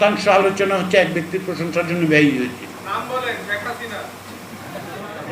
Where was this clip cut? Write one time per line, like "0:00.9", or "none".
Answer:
0:02.8